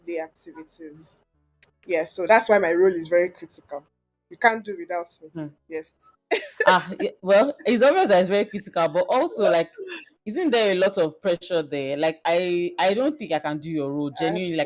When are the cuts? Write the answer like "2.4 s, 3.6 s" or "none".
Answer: none